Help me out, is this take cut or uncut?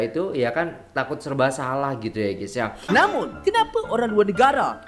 cut